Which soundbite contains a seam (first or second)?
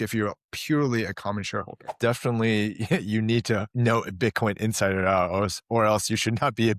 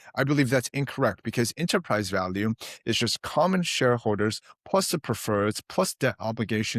first